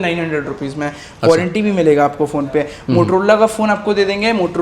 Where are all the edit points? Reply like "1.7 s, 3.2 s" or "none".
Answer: none